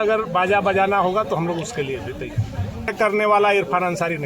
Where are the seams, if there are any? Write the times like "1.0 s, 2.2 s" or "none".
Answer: 2.9 s